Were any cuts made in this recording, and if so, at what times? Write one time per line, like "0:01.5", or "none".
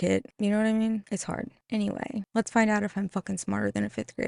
none